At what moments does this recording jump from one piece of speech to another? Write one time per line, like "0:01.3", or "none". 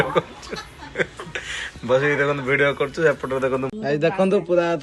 0:03.7